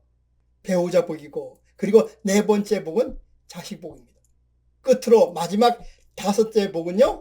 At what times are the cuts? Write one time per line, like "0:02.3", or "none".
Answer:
0:04.8